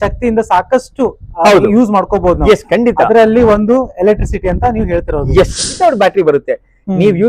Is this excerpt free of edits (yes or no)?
no